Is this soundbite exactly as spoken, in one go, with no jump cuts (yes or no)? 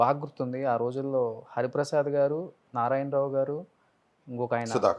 yes